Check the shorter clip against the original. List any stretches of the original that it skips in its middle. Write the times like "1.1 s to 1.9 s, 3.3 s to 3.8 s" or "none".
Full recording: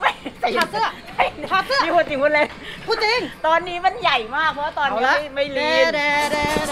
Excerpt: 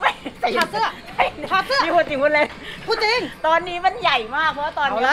none